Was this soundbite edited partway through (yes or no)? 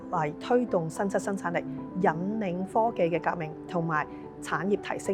no